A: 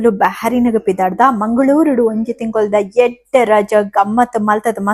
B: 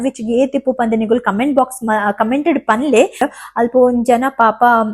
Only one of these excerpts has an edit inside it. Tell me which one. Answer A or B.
B